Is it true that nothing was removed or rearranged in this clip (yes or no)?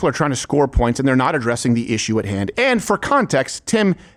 yes